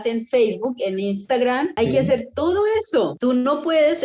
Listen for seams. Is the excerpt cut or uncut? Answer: cut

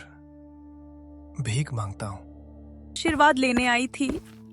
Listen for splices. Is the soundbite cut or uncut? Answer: cut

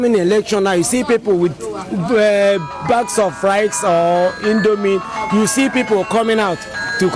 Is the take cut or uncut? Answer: uncut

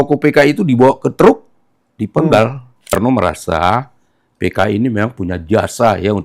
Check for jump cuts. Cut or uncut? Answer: cut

